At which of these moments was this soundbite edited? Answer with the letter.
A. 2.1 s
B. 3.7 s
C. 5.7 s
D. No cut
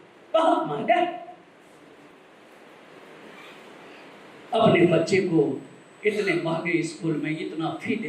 A